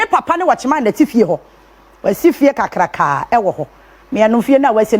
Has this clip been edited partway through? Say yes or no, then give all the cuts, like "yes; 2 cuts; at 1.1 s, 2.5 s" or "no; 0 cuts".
yes; 1 cut; at 2.3 s